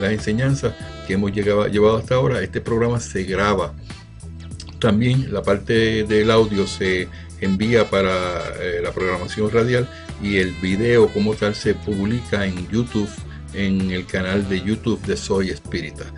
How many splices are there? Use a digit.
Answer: 1